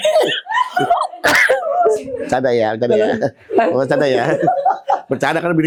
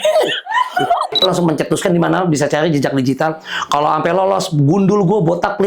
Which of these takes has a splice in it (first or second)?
second